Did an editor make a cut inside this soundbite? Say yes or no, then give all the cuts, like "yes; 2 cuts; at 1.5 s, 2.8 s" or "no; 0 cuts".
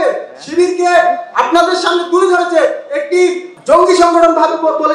yes; 1 cut; at 3.5 s